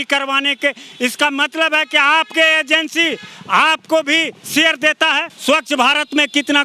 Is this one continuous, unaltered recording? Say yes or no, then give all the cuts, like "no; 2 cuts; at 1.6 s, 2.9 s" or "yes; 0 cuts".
no; 1 cut; at 5.3 s